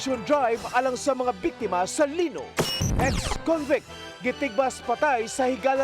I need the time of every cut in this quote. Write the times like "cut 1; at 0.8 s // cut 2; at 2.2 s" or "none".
cut 1; at 2.9 s